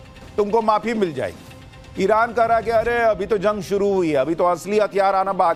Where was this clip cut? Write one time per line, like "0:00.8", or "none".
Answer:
none